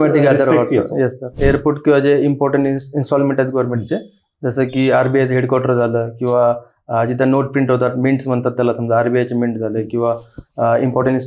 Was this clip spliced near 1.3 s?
yes; 1 cut; at 1.3 s

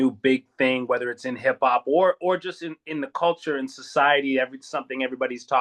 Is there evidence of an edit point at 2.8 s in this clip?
no; 0 cuts

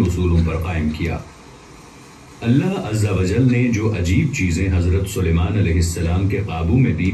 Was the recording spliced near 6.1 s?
no; 0 cuts

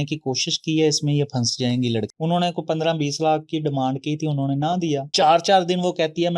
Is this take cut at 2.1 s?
yes; 2 cuts; at 2.1 s, 5.1 s

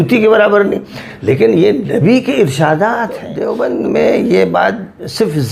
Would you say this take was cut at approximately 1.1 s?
no; 1 cut; at 3.3 s

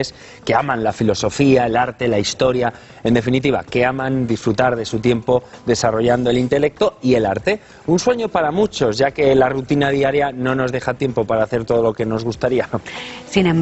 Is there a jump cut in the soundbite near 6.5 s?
yes; 1 cut; at 6.5 s

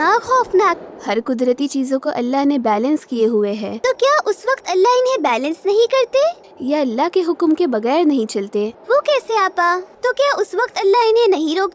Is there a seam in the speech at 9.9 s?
yes; 4 cuts; at 0.9 s, 3.7 s, 8.8 s, 9.9 s

